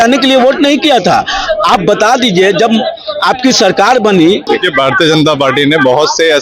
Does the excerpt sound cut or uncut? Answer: cut